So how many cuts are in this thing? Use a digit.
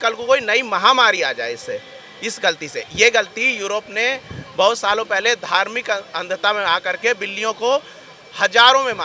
0